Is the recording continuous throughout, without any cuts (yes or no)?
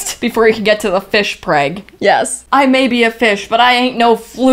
no